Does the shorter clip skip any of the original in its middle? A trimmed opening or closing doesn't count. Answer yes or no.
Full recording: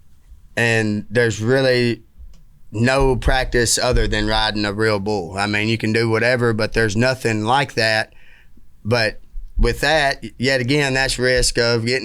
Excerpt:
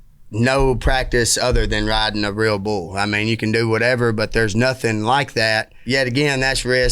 yes